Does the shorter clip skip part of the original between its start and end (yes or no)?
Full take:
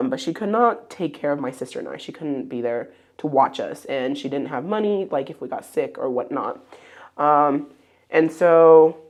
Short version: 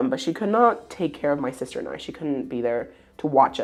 no